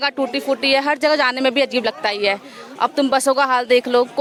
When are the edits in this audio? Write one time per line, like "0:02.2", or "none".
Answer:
none